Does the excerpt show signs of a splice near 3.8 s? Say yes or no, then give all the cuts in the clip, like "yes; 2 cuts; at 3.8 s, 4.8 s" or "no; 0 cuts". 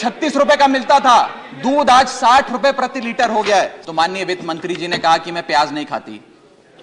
yes; 1 cut; at 3.8 s